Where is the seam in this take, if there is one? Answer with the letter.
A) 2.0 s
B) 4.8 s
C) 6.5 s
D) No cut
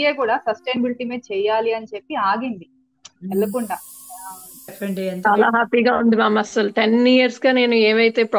B